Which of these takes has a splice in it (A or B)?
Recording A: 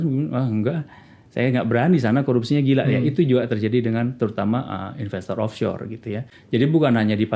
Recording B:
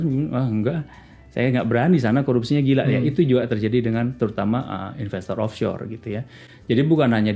A